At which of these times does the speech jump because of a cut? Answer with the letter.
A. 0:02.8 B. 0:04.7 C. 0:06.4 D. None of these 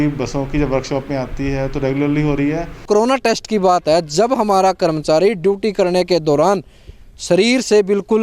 A